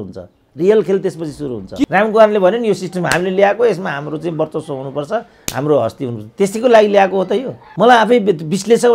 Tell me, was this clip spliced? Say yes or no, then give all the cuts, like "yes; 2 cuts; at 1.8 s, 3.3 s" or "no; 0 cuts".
yes; 2 cuts; at 1.8 s, 7.6 s